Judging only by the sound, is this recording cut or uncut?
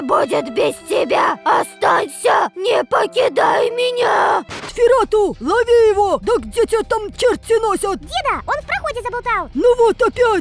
cut